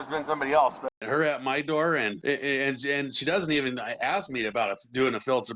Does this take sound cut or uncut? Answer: cut